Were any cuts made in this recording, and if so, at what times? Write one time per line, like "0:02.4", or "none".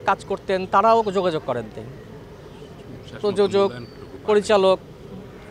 none